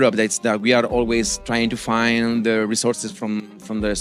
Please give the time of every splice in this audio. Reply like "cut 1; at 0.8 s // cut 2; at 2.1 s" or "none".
none

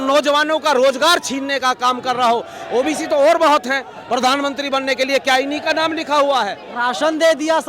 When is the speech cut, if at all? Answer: cut 1; at 6.6 s

